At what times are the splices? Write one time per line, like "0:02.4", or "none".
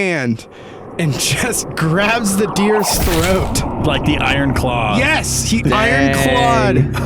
0:03.7